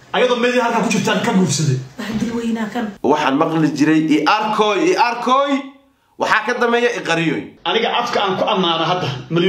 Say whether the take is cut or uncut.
cut